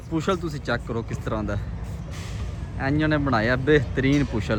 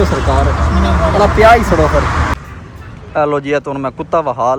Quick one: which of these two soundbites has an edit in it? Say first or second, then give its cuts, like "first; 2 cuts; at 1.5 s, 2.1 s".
second; 1 cut; at 2.3 s